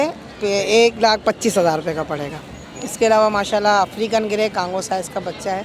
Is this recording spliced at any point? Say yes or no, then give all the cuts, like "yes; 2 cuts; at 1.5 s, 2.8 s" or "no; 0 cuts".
no; 0 cuts